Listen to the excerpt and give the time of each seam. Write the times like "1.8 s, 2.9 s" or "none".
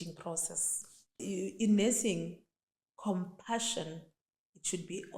1.2 s